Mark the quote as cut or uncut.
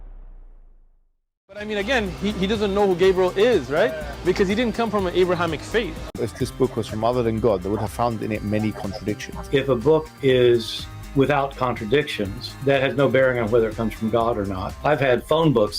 cut